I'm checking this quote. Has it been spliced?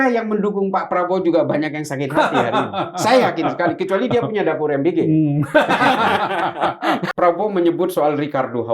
yes; 1 cut; at 7.1 s

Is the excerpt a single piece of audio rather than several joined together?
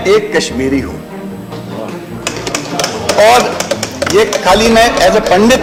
yes; 0 cuts

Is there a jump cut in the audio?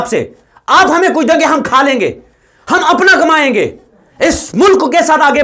no; 0 cuts

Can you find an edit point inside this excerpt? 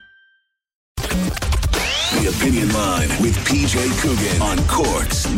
yes; 1 cut; at 1.0 s

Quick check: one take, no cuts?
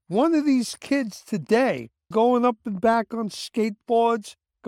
yes; 0 cuts

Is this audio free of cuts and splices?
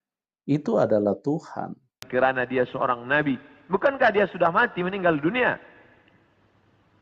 no; 1 cut; at 2.0 s

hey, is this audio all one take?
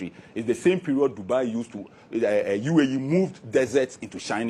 yes; 0 cuts

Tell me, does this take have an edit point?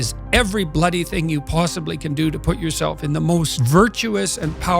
yes; 1 cut; at 3.6 s

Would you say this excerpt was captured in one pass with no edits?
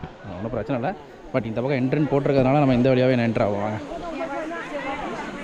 yes; 0 cuts

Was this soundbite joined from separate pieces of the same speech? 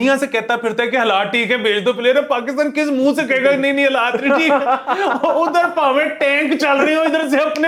no; 0 cuts

